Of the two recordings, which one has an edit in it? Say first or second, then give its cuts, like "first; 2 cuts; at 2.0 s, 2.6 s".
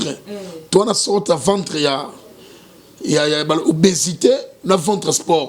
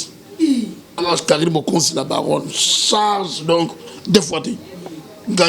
second; 1 cut; at 1.0 s